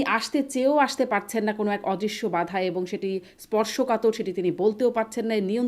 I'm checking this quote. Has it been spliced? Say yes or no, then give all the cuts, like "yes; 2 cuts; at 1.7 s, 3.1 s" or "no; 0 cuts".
no; 0 cuts